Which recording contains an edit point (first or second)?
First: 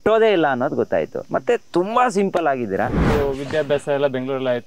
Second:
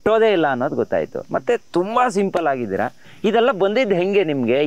first